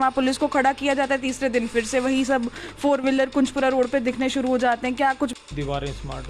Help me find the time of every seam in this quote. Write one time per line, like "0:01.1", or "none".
0:05.4